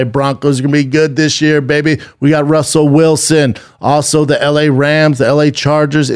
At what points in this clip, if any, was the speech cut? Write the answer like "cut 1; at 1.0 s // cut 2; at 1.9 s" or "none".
none